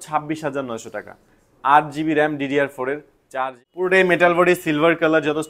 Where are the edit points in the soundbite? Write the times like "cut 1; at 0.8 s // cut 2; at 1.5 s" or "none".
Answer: cut 1; at 3.2 s

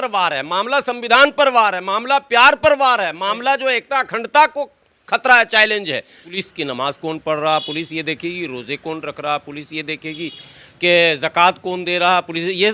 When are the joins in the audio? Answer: cut 1; at 6.2 s

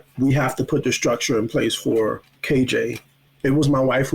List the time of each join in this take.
cut 1; at 2.7 s

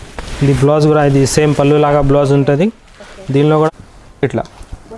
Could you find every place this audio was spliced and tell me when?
cut 1; at 3.7 s

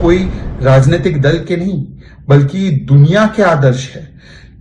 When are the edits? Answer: none

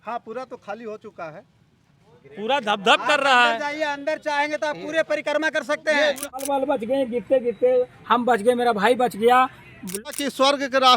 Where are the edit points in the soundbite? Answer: cut 1; at 6.4 s // cut 2; at 10.0 s

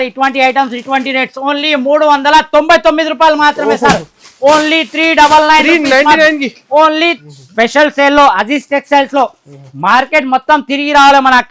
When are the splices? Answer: cut 1; at 7.2 s

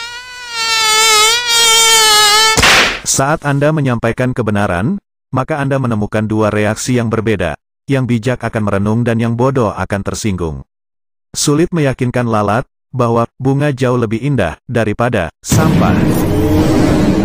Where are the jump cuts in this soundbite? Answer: cut 1; at 15.4 s

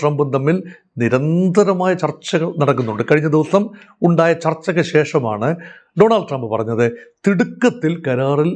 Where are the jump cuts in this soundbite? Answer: none

